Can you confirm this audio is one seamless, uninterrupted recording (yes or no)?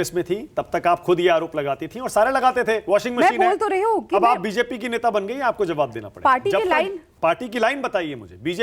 yes